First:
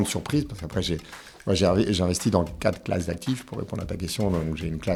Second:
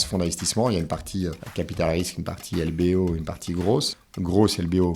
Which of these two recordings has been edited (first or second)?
second